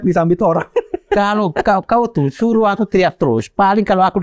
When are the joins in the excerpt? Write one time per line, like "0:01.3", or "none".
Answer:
none